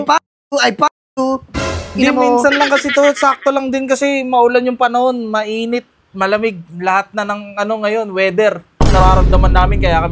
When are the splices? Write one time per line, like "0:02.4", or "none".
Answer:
none